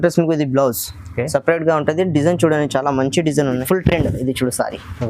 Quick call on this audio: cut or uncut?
cut